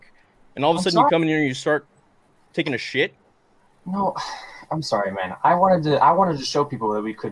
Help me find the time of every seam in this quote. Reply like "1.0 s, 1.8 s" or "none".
none